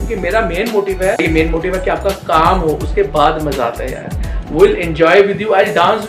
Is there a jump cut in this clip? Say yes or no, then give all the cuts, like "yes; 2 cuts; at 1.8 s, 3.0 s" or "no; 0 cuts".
yes; 1 cut; at 1.2 s